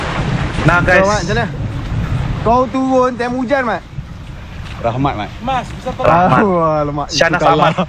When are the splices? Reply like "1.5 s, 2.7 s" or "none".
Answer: none